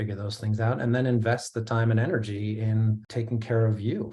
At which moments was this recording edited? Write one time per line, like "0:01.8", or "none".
0:03.0